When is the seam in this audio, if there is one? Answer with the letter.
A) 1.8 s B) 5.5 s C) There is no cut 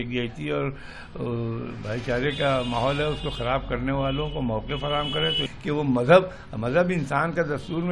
B